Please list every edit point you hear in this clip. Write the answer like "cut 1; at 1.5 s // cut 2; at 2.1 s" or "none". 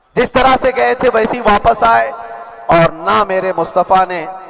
none